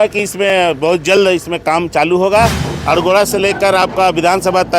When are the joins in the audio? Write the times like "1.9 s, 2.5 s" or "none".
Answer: 2.7 s